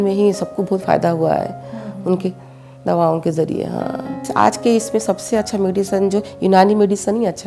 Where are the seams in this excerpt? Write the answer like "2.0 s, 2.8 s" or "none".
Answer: 4.2 s

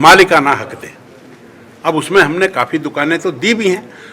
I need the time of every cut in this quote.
none

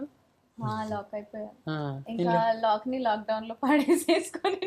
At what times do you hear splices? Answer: none

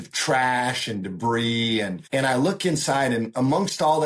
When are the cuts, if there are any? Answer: 2.0 s

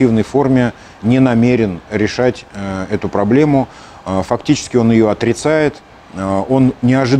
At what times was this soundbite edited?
3.7 s

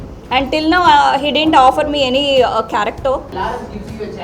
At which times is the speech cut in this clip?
3.3 s

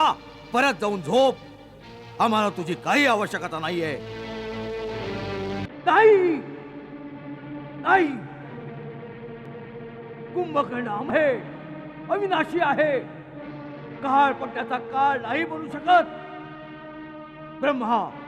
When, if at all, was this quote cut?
5.7 s

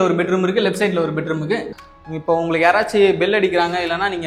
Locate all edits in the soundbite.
1.7 s

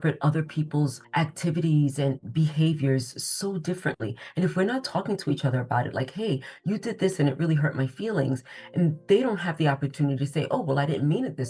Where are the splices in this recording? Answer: 1.0 s

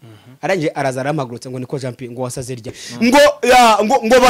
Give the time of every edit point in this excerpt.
2.9 s

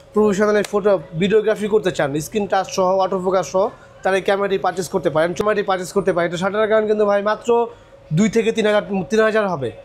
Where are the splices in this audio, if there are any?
5.4 s

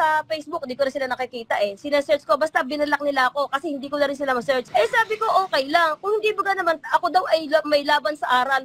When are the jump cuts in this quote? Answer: 4.7 s

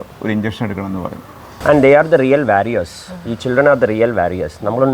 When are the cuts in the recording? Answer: 1.6 s

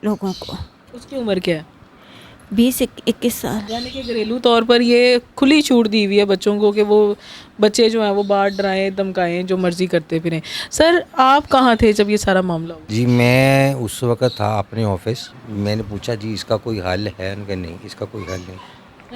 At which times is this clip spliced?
3.7 s, 12.8 s, 15.3 s

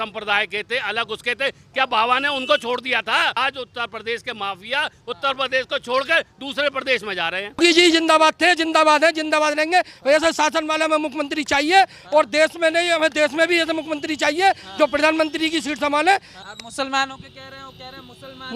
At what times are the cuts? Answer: 3.3 s, 7.6 s, 16.3 s

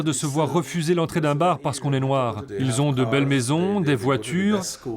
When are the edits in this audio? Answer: 2.4 s

